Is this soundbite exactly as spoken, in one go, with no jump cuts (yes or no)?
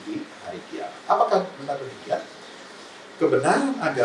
yes